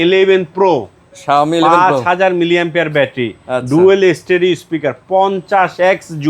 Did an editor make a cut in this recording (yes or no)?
no